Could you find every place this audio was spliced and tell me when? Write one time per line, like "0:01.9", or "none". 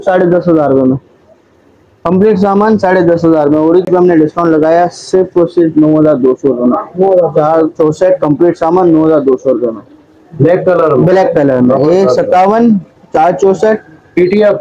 0:03.9